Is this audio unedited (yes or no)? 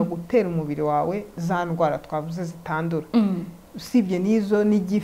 yes